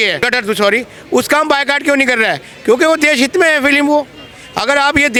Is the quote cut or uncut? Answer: uncut